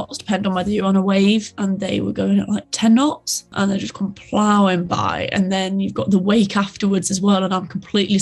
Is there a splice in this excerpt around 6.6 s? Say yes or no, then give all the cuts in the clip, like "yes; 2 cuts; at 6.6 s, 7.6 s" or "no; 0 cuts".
no; 2 cuts; at 1.5 s, 3.5 s